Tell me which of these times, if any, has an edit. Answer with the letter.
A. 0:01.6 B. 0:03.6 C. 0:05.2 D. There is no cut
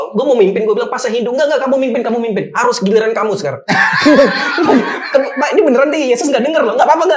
D